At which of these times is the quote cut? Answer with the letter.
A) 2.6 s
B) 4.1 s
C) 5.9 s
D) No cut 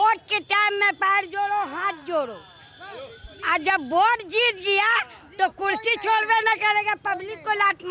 D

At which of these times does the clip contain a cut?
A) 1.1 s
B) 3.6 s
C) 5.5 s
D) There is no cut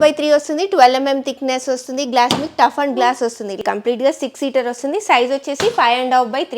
B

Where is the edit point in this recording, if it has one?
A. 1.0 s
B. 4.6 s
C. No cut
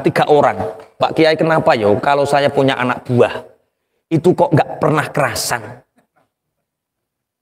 A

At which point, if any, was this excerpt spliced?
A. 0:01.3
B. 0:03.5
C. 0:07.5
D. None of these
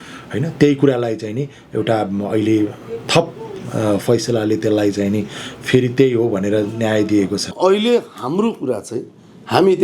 C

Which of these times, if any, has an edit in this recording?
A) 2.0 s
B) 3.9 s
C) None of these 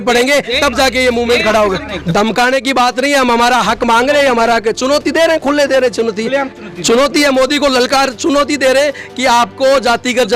A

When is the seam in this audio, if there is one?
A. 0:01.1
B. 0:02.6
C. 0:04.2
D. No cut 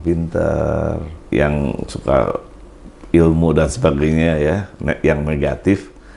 A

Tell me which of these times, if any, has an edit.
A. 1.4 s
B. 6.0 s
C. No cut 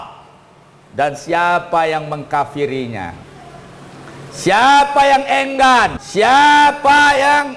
B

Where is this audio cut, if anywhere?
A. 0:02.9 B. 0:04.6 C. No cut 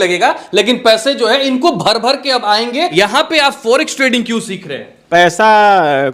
A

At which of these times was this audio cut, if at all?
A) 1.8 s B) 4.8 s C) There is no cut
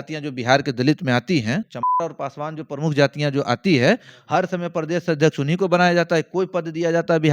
A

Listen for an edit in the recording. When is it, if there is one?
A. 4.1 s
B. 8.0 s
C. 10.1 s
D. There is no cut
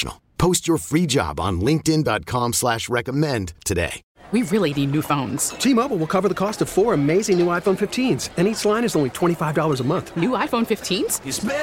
A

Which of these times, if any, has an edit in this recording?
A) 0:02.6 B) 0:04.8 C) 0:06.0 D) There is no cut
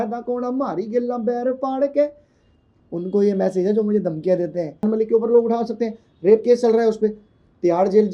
B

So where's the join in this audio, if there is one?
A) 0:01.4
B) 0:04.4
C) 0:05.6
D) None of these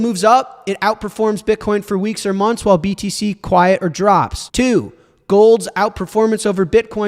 B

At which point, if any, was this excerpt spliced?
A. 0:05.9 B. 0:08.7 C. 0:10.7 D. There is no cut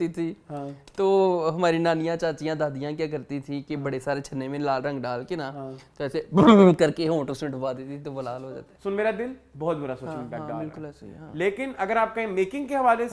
B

